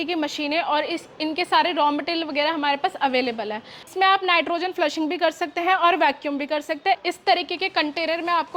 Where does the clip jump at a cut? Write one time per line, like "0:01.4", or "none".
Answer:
0:03.8
0:07.1